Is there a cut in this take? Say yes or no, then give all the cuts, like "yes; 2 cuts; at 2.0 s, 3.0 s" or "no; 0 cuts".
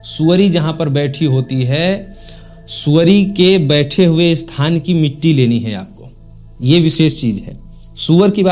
no; 0 cuts